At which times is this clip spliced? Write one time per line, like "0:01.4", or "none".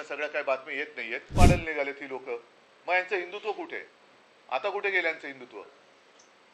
0:01.3